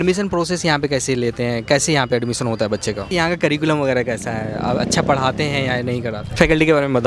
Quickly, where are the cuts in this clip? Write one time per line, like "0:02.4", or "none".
0:03.1
0:06.3